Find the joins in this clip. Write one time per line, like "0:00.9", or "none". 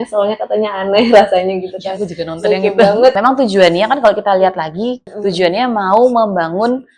0:03.1
0:05.1